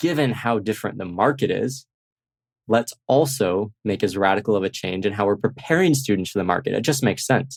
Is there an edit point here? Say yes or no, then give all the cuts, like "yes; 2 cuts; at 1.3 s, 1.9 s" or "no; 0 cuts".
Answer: no; 0 cuts